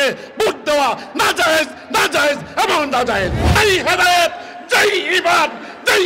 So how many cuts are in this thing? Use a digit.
1